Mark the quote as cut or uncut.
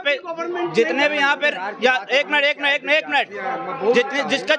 uncut